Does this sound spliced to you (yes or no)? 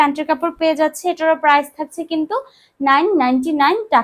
no